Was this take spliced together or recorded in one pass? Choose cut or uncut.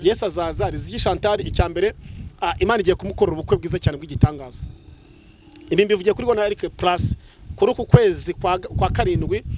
uncut